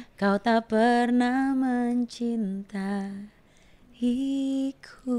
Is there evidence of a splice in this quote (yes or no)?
no